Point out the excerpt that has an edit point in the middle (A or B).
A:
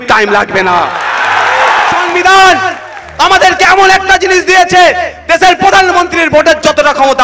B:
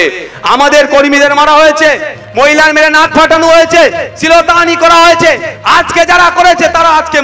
A